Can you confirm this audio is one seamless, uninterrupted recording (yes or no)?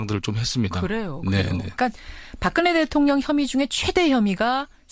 yes